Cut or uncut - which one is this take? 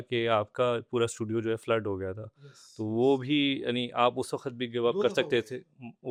uncut